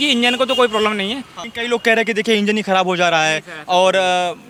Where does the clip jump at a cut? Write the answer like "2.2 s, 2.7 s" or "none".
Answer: 1.3 s